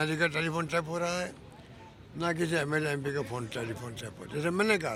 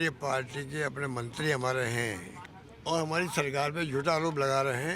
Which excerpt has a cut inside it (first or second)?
second